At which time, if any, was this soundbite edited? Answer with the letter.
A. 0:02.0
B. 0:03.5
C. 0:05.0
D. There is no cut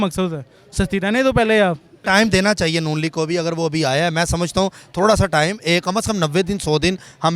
A